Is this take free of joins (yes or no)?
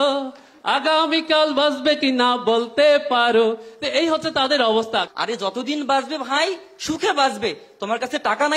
no